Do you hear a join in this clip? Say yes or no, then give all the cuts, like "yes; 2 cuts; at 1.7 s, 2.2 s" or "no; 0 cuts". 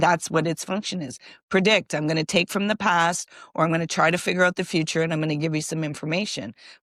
no; 0 cuts